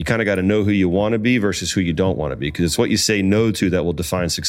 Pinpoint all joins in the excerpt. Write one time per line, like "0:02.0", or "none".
none